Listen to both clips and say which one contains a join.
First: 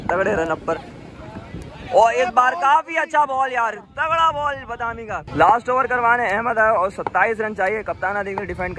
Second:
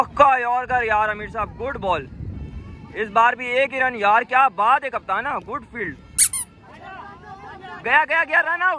first; 1 cut; at 5.2 s

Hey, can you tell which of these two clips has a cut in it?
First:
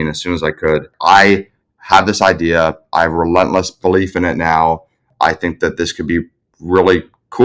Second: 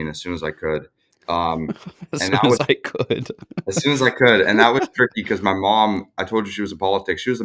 first; 2 cuts; at 0.9 s, 5.1 s

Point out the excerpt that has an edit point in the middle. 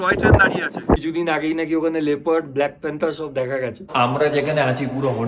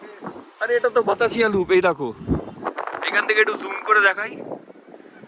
first; 2 cuts; at 1.0 s, 3.8 s

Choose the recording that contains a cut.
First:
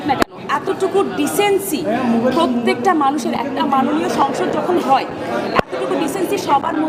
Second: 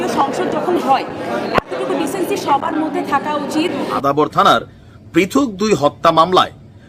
second; 1 cut; at 3.9 s

